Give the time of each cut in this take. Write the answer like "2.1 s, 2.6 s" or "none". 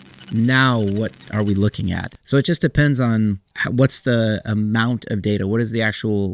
2.1 s, 3.5 s